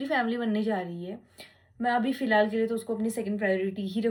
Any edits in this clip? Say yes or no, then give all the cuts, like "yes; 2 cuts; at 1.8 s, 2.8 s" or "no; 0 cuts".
no; 0 cuts